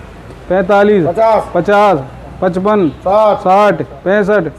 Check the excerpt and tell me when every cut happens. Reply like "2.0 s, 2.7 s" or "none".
none